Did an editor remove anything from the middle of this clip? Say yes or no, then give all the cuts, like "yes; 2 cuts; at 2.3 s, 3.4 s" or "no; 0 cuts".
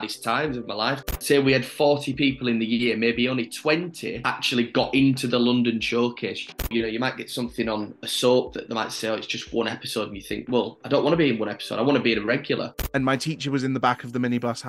yes; 3 cuts; at 1.1 s, 6.7 s, 12.8 s